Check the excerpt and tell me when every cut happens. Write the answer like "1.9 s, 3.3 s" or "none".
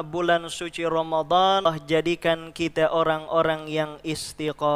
1.6 s